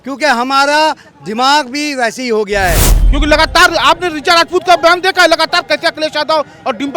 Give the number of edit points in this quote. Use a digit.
1